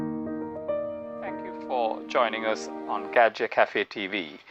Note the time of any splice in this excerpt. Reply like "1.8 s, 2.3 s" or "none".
1.1 s